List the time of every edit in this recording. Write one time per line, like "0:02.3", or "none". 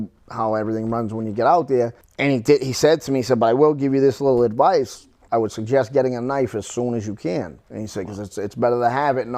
0:02.0
0:05.2
0:07.6

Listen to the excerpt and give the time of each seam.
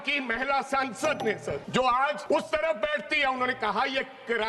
0:01.6
0:02.2

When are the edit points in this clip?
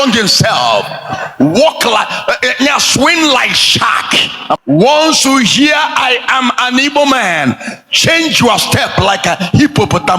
0:04.6

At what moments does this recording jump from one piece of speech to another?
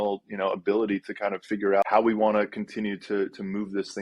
0:01.8

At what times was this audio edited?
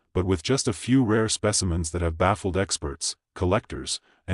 none

